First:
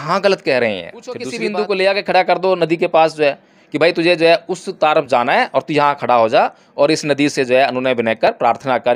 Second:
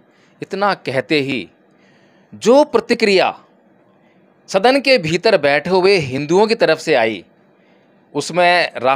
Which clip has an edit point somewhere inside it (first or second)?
first